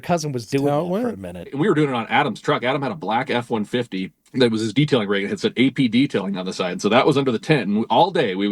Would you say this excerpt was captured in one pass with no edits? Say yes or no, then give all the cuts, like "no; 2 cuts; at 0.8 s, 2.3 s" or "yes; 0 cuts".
no; 2 cuts; at 1.5 s, 4.2 s